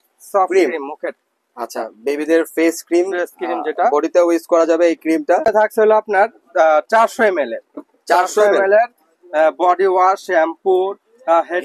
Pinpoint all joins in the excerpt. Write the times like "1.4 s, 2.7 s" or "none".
5.5 s